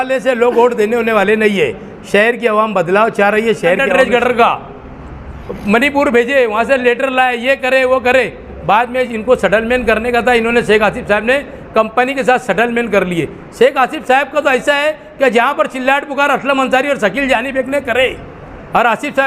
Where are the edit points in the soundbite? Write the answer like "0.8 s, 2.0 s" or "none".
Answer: 3.8 s